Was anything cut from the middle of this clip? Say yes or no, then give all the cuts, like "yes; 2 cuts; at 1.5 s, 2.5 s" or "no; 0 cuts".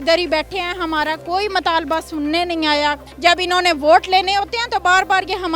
yes; 1 cut; at 3.0 s